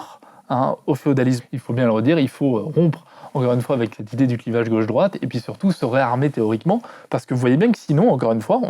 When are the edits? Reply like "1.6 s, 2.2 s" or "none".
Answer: 1.4 s